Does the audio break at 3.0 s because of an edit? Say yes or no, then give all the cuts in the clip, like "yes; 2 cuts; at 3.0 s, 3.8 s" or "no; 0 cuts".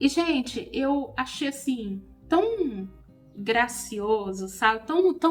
no; 0 cuts